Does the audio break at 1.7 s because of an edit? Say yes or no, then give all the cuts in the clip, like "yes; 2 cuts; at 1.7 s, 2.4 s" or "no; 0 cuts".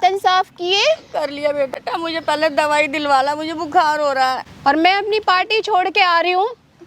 yes; 1 cut; at 1.7 s